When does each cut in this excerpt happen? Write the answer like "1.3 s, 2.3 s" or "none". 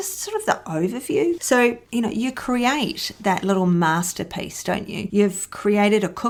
none

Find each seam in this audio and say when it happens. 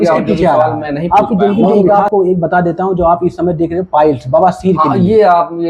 1.7 s

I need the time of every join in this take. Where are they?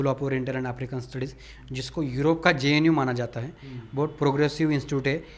none

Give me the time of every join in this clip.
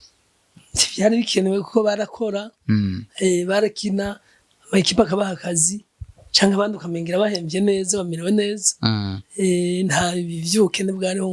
none

